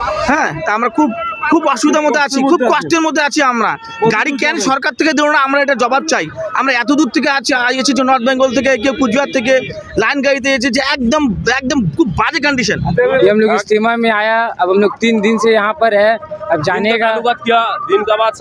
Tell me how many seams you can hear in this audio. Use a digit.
1